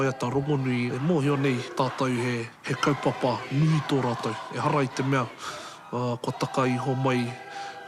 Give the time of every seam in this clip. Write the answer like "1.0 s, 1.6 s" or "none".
0.9 s, 1.7 s, 2.6 s